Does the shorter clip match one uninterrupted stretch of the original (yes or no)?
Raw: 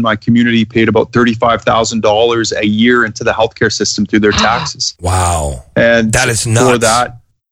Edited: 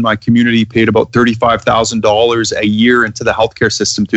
yes